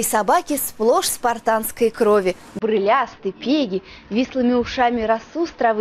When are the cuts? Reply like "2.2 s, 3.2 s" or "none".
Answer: none